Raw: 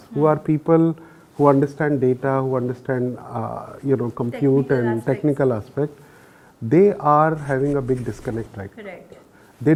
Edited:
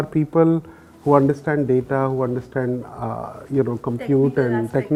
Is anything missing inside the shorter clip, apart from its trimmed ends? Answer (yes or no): no